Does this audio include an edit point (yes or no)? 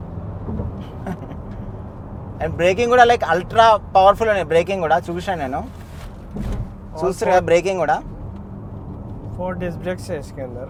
no